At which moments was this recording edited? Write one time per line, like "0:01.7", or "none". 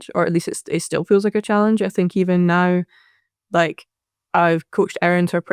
none